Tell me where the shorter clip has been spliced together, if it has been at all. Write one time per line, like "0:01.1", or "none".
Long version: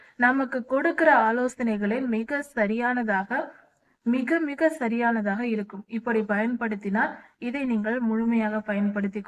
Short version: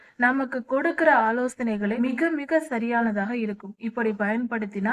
0:02.0